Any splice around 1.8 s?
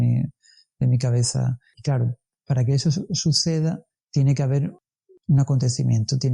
yes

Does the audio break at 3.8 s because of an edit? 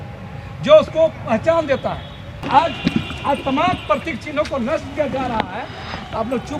no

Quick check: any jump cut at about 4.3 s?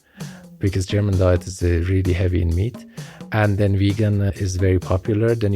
yes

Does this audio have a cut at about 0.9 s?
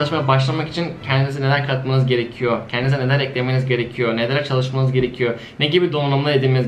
no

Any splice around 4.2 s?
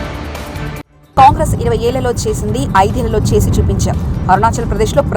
no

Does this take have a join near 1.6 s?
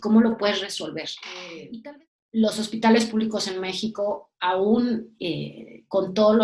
yes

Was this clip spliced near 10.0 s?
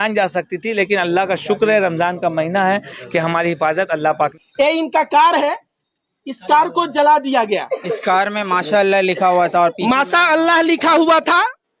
no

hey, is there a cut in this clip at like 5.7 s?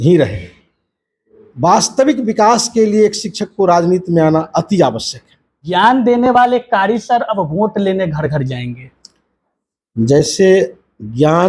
yes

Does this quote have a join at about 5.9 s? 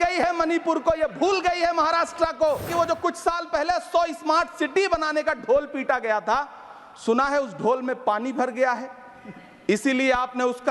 no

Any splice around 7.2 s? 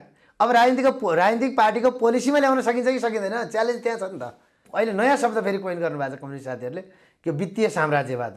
no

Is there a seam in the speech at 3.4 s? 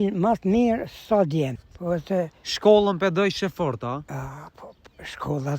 no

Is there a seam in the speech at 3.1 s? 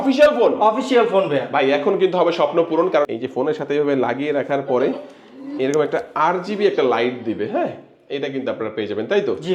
yes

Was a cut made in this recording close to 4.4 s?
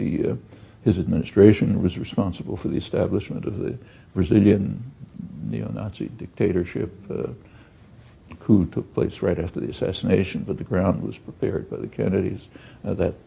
no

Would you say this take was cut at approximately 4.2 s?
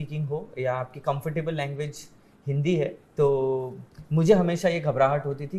no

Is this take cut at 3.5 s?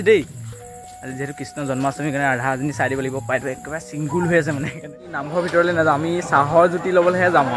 no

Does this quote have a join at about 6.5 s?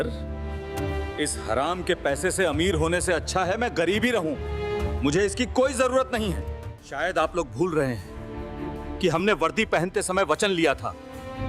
yes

